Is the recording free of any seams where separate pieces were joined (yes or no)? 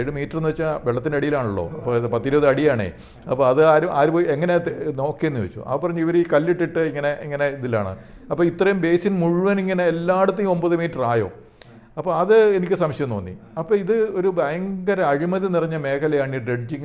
yes